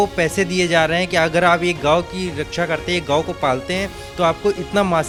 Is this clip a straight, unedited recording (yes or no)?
yes